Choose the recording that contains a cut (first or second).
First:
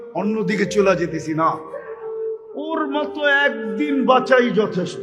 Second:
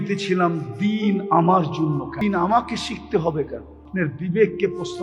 second